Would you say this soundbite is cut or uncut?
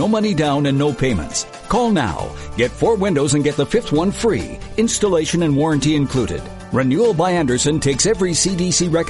uncut